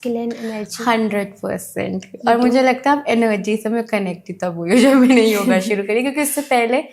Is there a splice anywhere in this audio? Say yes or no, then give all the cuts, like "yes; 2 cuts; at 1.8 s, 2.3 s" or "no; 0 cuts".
no; 0 cuts